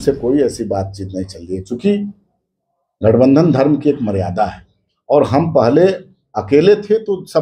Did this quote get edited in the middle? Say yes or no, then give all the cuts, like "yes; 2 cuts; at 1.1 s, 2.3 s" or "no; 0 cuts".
no; 0 cuts